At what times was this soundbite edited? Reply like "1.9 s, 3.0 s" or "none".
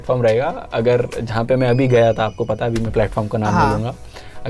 none